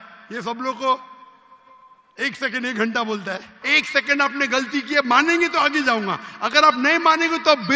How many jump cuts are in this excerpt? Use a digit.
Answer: 1